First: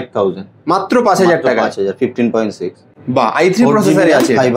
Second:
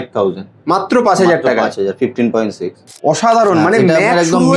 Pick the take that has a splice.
second; 1 cut; at 2.9 s

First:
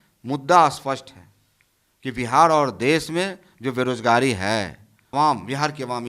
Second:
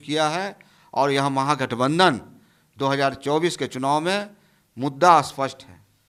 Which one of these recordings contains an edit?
first; 1 cut; at 5.1 s

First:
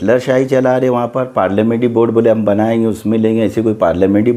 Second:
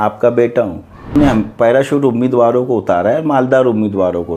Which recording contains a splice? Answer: second; 1 cut; at 1.2 s

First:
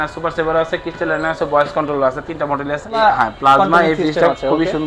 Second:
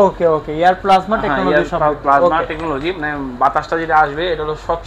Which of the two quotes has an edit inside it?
first; 1 cut; at 3.0 s

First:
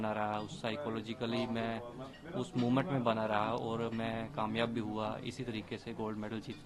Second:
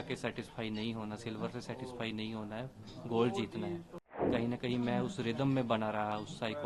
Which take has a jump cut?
second; 1 cut; at 4.3 s

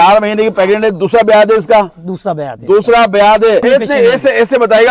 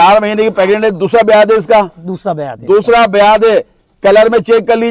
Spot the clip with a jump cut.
first; 1 cut; at 3.6 s

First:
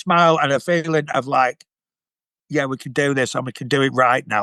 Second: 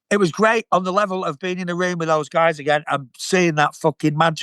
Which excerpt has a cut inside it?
second; 1 cut; at 3.1 s

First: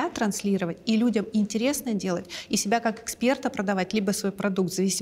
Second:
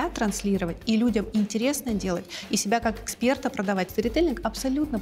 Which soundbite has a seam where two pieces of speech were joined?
second; 1 cut; at 3.9 s

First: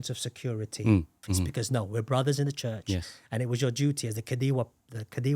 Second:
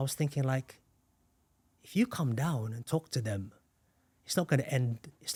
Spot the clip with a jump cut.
first; 1 cut; at 1.2 s

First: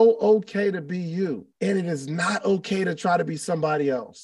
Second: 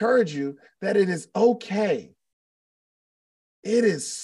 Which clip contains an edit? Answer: first; 1 cut; at 1.5 s

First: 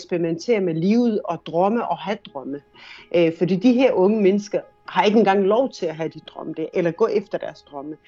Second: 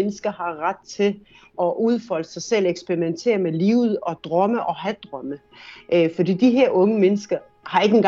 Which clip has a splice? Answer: second; 1 cut; at 1.5 s

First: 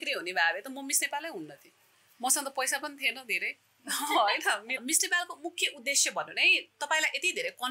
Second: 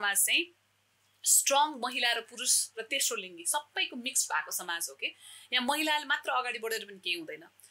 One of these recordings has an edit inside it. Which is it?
first; 1 cut; at 4.8 s

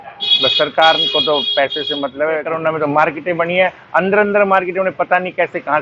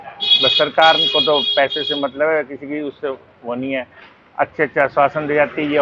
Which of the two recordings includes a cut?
first; 1 cut; at 2.5 s

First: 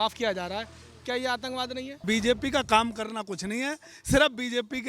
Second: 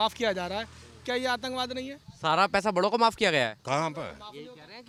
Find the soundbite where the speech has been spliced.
first; 1 cut; at 2.0 s

